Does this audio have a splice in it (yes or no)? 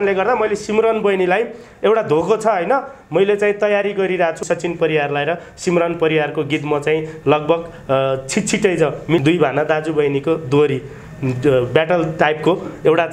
yes